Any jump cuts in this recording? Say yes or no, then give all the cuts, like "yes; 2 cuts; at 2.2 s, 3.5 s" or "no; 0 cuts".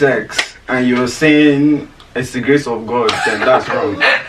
no; 0 cuts